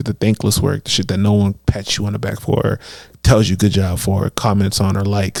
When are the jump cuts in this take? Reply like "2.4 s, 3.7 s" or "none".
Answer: none